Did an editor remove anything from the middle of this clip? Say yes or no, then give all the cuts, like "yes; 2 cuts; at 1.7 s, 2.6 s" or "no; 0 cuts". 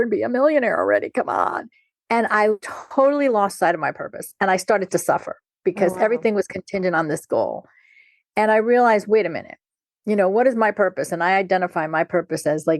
yes; 1 cut; at 2.7 s